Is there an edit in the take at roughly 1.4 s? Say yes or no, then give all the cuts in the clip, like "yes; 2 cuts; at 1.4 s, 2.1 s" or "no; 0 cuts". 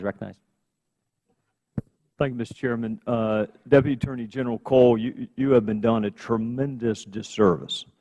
no; 1 cut; at 5.0 s